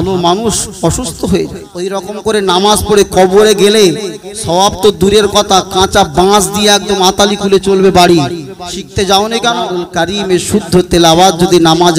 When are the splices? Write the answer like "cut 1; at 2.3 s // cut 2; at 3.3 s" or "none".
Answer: cut 1; at 2.0 s // cut 2; at 9.9 s